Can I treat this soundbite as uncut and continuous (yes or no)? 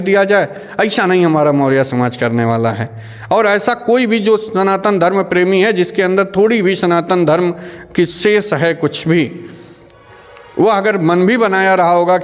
yes